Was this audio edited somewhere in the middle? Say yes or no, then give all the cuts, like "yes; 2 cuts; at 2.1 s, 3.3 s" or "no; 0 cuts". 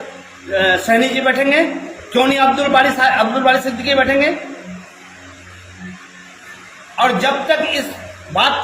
no; 0 cuts